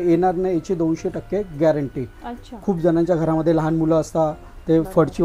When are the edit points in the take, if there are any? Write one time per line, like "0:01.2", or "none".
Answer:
none